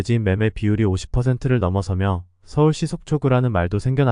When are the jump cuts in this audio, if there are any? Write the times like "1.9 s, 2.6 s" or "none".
none